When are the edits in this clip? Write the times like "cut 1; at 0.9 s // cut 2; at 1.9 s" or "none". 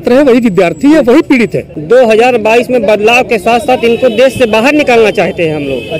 cut 1; at 1.7 s

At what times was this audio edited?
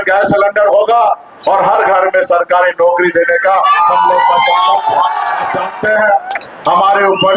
cut 1; at 5.6 s

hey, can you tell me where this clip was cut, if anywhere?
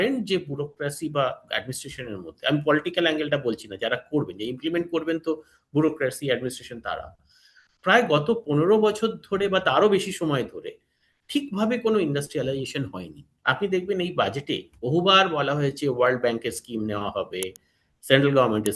cut 1; at 13.3 s

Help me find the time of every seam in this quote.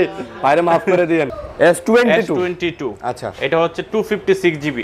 cut 1; at 1.4 s

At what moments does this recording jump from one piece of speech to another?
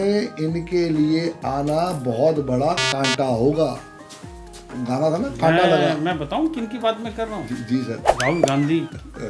none

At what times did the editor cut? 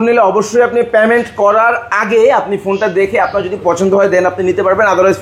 none

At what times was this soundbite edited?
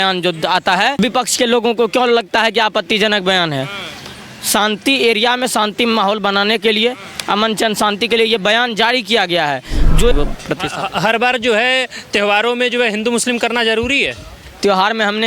cut 1; at 1.0 s // cut 2; at 10.1 s

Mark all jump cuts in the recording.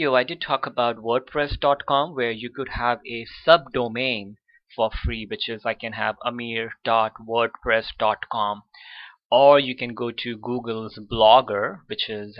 cut 1; at 3.3 s

